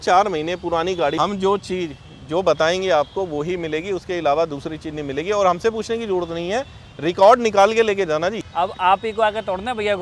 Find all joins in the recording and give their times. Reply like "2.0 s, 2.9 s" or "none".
1.2 s, 8.4 s